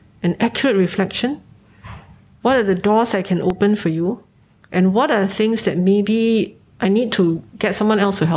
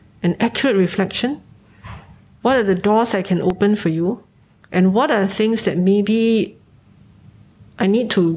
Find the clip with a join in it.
first; 2 cuts; at 6.6 s, 7.5 s

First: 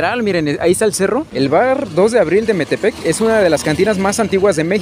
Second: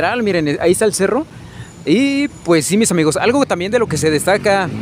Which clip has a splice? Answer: first; 1 cut; at 1.3 s

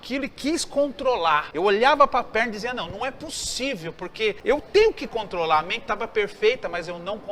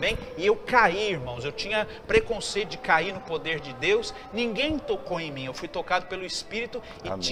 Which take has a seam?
first; 2 cuts; at 1.5 s, 4.4 s

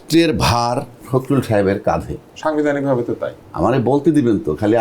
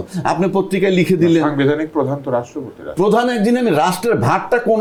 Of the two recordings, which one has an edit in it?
first; 2 cuts; at 1.0 s, 3.4 s

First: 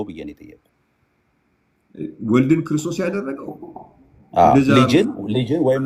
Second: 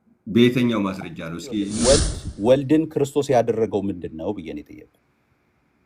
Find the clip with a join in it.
second; 1 cut; at 1.7 s

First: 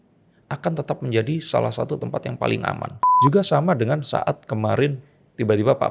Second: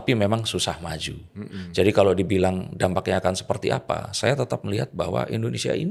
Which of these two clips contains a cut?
first; 1 cut; at 3.1 s

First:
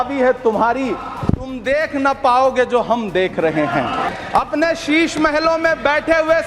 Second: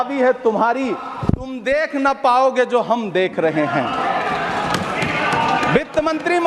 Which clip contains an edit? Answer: first; 1 cut; at 4.1 s

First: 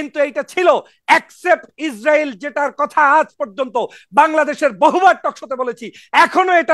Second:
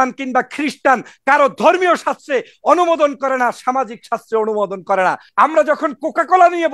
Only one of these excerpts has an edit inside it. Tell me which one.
second; 1 cut; at 5.2 s

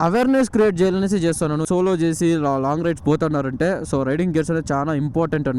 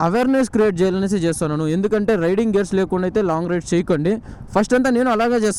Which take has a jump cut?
first; 1 cut; at 1.6 s

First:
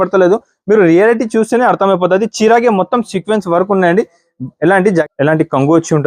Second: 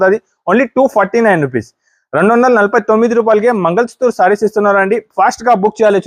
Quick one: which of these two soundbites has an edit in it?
first; 1 cut; at 5.0 s

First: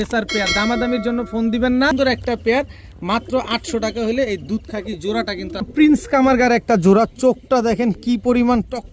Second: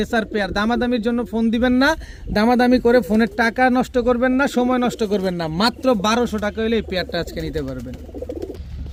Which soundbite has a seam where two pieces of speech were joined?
first; 2 cuts; at 1.9 s, 5.7 s

